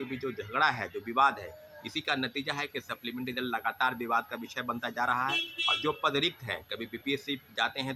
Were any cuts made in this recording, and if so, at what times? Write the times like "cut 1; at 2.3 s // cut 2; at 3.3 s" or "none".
none